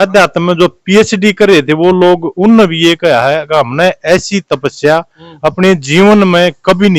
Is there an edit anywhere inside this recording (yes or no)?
no